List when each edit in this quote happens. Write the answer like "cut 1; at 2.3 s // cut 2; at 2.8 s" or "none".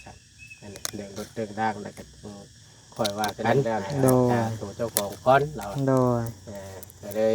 cut 1; at 4.6 s